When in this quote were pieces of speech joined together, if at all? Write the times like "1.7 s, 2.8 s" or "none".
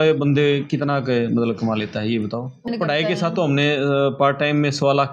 2.7 s